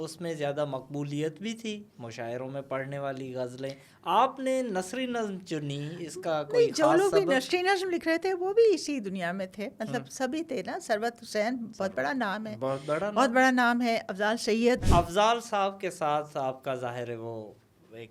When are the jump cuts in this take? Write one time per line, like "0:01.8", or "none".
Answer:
0:14.8

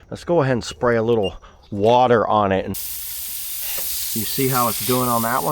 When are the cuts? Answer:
0:02.8

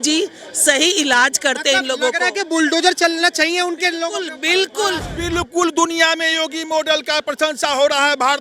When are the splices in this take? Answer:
0:05.1

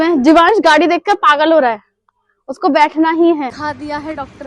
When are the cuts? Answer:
0:03.6

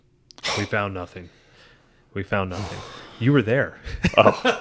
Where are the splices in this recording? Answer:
none

